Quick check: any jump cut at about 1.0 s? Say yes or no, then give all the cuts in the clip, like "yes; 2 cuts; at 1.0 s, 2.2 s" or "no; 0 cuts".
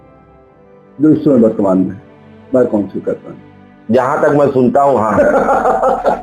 yes; 1 cut; at 1.0 s